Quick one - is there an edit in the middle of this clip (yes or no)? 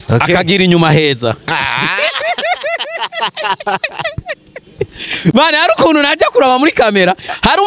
no